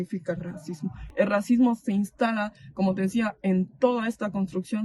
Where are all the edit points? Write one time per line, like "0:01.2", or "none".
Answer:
0:01.0